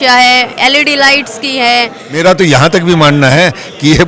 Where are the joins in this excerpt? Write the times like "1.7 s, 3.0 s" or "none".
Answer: 2.0 s